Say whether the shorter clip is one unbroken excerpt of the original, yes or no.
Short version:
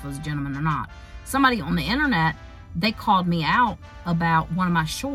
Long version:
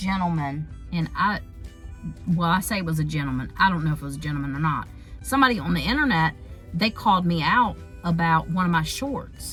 yes